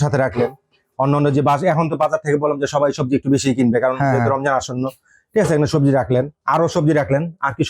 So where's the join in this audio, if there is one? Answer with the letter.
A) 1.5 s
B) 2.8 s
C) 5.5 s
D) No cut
D